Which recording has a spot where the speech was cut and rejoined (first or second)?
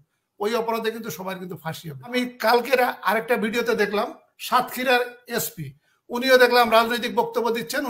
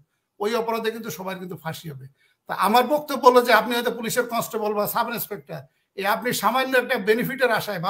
first